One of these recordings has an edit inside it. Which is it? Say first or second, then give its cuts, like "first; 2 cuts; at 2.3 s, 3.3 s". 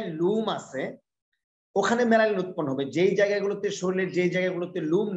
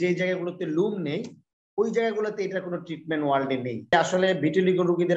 second; 1 cut; at 3.9 s